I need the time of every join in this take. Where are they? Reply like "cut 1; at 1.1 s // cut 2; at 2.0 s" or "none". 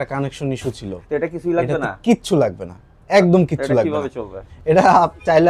cut 1; at 4.5 s

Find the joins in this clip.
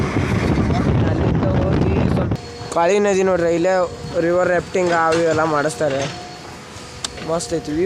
cut 1; at 2.3 s

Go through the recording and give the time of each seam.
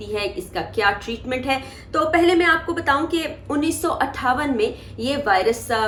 none

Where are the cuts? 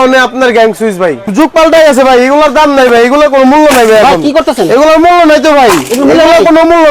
cut 1; at 1.3 s

